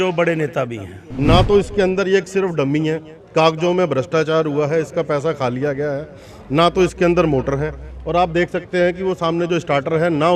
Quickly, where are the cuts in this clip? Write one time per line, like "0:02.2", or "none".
0:01.0

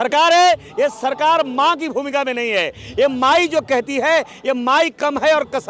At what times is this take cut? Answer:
none

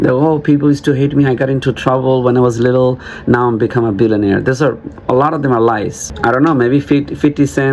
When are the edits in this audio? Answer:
none

